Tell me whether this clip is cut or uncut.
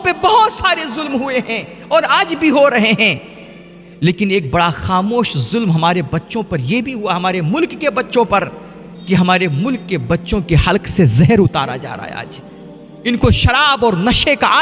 uncut